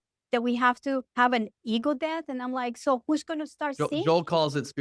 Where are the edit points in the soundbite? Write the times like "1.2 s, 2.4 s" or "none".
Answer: 1.1 s